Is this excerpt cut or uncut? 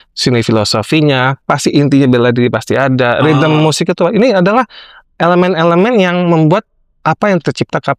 uncut